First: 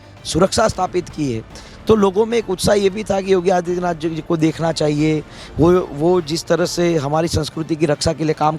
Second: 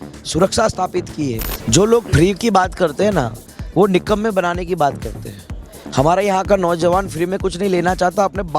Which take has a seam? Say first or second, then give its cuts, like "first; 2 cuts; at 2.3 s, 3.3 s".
second; 1 cut; at 1.5 s